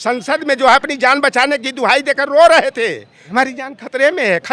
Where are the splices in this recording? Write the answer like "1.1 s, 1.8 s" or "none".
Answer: 3.3 s